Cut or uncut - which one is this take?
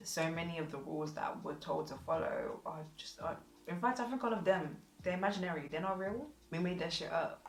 uncut